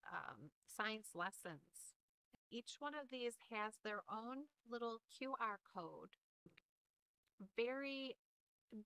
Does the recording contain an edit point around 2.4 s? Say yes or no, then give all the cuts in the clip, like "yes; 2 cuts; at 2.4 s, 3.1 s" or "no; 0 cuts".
yes; 2 cuts; at 2.4 s, 6.4 s